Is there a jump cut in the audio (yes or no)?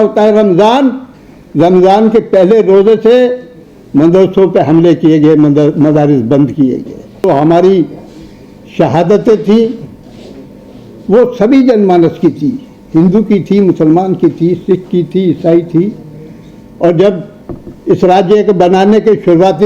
yes